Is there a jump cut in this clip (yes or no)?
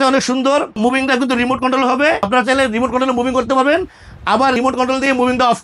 no